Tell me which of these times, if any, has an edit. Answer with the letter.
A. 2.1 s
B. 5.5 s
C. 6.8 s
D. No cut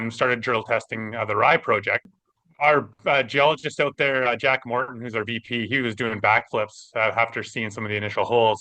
A